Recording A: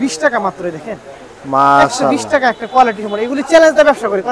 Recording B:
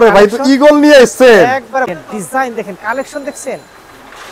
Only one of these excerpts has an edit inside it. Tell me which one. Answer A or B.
B